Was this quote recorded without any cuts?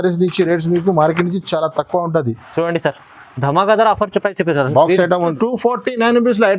no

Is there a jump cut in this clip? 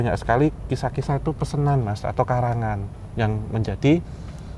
no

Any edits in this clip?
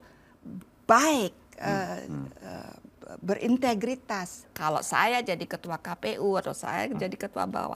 yes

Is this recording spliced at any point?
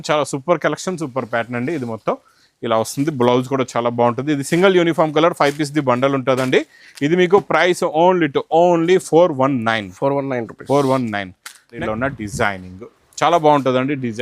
yes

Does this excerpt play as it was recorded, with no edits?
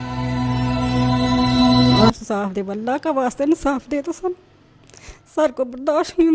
no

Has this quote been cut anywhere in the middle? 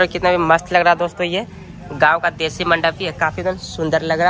no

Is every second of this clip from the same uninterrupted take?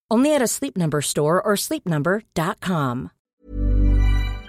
no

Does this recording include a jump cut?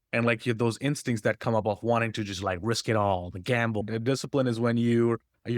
yes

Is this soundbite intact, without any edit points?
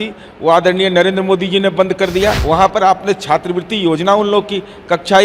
no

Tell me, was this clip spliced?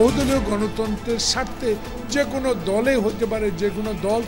no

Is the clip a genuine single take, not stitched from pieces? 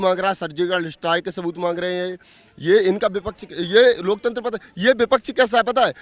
yes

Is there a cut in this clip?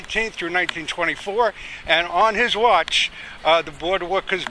yes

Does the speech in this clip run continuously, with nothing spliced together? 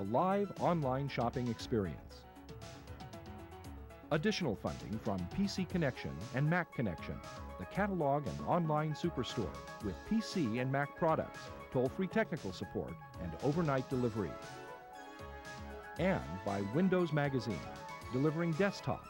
no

